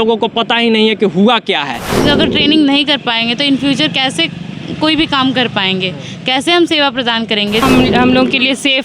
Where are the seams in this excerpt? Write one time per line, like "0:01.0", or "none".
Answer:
0:01.9
0:07.6